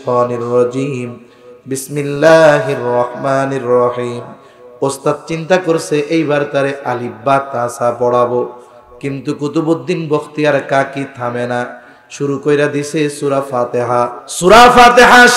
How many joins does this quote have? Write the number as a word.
one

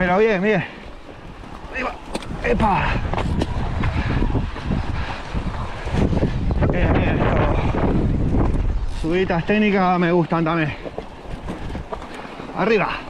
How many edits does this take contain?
zero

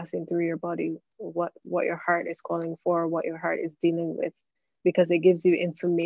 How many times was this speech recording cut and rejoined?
zero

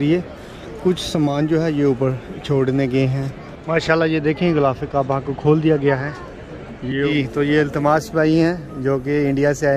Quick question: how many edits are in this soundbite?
two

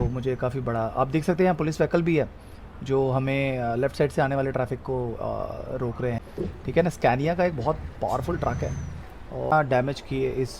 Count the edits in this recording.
two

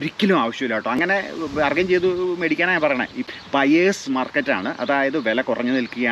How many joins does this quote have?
two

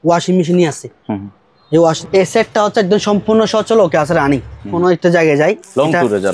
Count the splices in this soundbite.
two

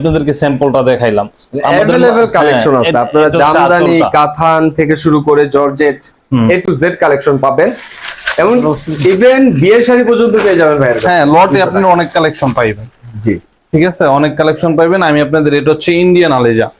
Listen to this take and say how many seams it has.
zero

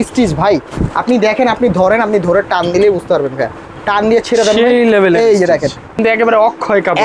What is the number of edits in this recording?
one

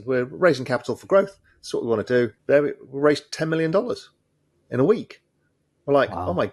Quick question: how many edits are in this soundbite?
one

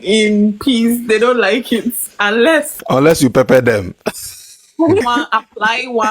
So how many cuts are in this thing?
two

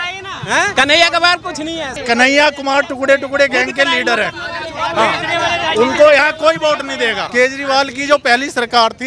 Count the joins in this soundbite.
three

